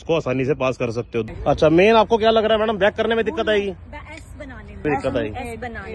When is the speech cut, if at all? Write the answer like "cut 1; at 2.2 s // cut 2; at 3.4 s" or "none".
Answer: cut 1; at 1.3 s // cut 2; at 4.8 s